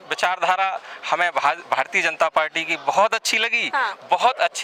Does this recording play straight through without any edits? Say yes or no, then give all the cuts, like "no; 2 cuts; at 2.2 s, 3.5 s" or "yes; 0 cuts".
yes; 0 cuts